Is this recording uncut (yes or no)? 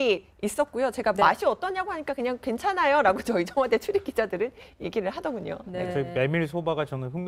yes